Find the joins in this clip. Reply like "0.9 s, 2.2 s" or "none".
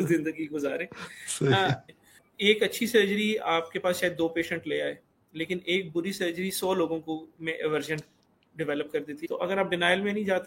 2.0 s, 9.2 s